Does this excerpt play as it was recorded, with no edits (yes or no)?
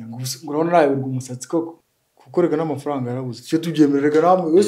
no